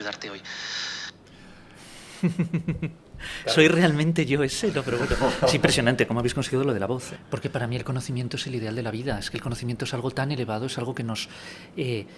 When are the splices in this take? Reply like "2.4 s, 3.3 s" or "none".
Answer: 7.1 s